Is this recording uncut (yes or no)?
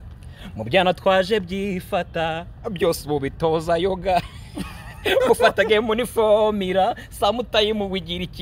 yes